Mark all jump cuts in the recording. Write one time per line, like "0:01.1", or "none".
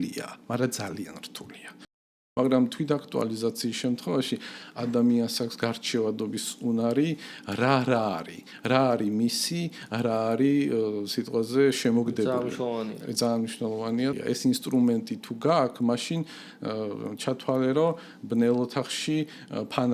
0:02.0
0:14.2